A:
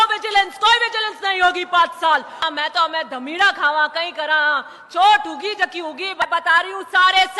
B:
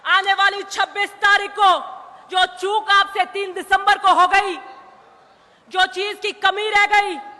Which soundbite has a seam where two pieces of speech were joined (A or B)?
A